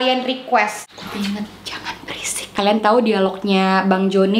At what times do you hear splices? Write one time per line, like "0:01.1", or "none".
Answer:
0:00.9
0:02.3